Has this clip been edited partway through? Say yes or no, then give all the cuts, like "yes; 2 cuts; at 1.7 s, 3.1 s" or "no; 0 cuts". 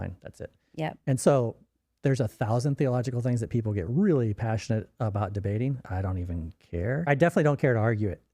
yes; 2 cuts; at 5.8 s, 7.1 s